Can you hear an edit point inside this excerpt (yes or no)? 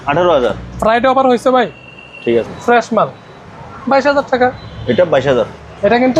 yes